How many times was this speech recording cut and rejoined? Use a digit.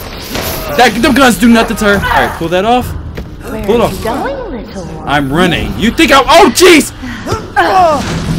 1